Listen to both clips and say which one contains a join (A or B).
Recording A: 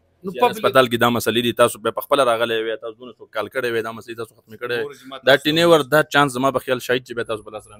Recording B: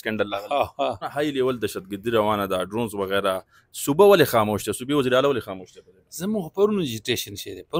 B